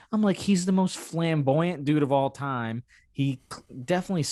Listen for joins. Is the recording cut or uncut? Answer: uncut